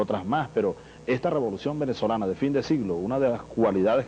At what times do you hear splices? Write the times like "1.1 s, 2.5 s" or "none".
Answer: 1.0 s